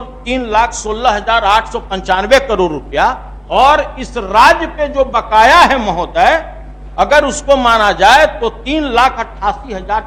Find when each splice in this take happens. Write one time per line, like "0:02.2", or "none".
none